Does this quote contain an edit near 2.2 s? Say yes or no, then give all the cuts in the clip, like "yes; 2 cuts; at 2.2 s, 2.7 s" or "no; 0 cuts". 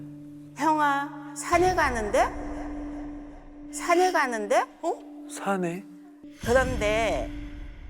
no; 1 cut; at 6.2 s